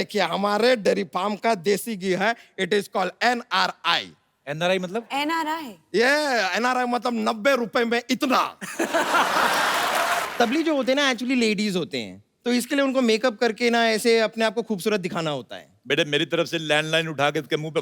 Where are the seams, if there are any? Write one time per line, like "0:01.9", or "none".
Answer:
0:10.3